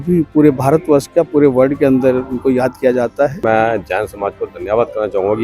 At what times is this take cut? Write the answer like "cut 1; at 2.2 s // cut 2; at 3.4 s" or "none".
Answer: cut 1; at 3.4 s